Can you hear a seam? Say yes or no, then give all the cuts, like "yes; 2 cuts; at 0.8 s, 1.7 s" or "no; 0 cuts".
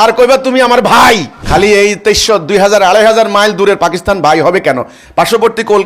yes; 1 cut; at 1.3 s